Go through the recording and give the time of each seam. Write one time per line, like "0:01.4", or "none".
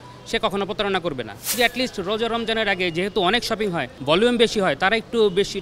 0:01.5
0:03.9